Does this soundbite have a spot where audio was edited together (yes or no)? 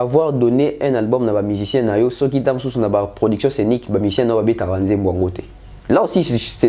no